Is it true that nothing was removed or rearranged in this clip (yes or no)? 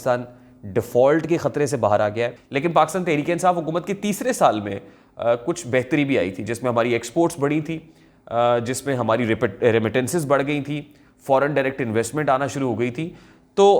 no